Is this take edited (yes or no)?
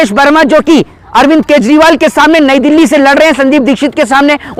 no